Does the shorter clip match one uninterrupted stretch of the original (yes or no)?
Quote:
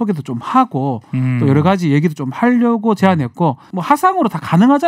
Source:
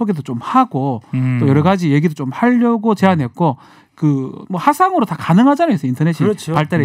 no